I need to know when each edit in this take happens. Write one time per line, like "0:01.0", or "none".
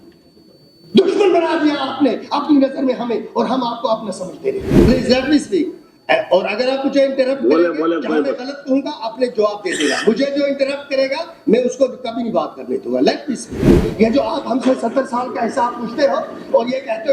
0:04.7
0:13.8